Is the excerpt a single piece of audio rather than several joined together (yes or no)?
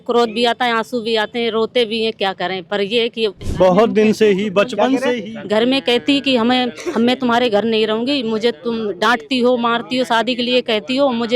no